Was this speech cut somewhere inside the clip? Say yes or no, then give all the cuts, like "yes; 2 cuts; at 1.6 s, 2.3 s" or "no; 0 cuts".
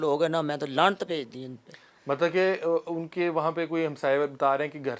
no; 0 cuts